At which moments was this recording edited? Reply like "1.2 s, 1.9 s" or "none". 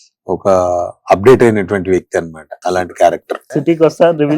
2.4 s, 3.4 s